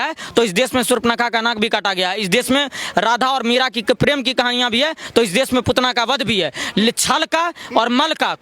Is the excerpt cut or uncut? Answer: uncut